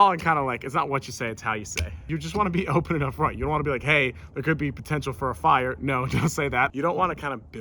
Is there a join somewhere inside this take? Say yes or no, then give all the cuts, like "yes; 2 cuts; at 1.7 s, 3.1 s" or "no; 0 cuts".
yes; 1 cut; at 2.1 s